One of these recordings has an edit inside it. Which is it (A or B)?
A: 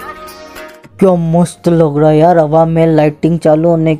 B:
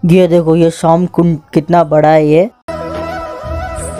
B